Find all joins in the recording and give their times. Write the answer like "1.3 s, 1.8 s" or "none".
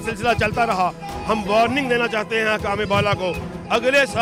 none